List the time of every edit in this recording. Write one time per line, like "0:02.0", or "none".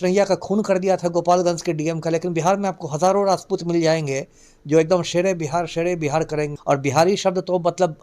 0:06.5